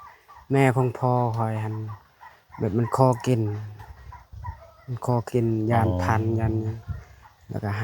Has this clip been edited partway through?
no; 0 cuts

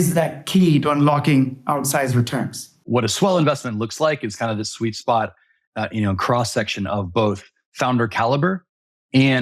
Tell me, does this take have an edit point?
yes; 1 cut; at 2.8 s

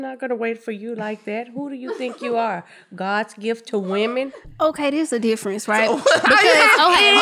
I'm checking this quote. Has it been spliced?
yes; 1 cut; at 4.4 s

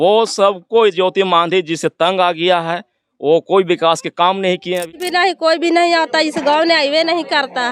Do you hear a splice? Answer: yes; 1 cut; at 5.0 s

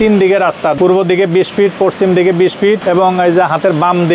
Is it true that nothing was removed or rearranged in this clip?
no; 2 cuts; at 0.8 s, 2.8 s

